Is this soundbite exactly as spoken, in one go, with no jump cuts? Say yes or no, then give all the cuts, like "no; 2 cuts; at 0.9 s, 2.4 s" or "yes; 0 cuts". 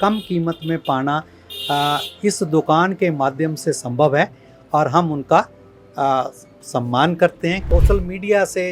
no; 1 cut; at 7.6 s